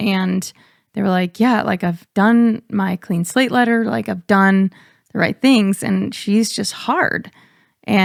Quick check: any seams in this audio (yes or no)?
no